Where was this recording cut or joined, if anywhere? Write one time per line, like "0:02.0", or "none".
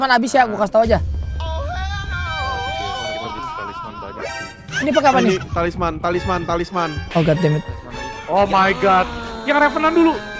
0:09.3